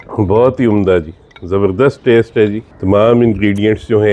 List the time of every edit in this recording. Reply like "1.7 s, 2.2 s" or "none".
2.7 s